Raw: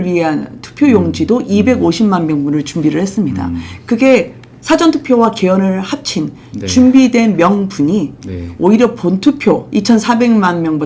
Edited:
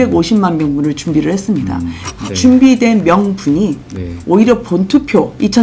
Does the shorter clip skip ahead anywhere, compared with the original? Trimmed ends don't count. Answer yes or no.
yes